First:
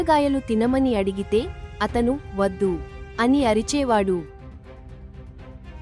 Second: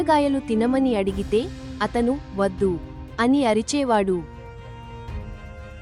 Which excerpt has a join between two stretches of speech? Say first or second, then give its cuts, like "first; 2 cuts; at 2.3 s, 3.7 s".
second; 1 cut; at 4.3 s